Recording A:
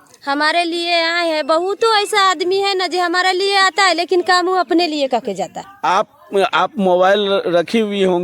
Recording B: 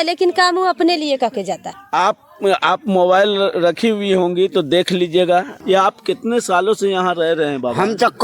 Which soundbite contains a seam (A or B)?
B